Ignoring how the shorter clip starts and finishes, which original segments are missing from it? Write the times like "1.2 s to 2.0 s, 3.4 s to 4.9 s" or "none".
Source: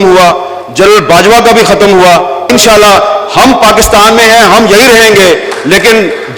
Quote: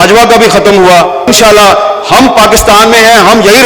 2.4 s to 2.5 s